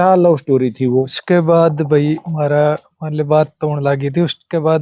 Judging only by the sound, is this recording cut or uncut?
cut